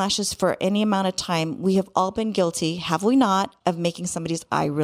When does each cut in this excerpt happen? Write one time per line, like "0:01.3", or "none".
0:03.5